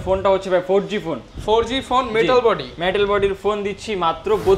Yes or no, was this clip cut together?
no